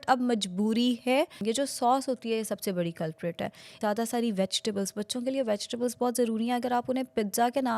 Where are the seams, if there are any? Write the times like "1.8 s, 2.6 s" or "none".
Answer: 1.4 s, 3.8 s